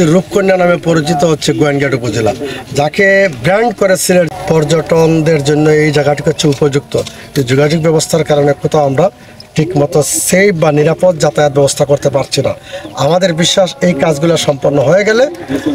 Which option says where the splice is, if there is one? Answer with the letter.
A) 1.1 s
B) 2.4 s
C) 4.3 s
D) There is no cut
C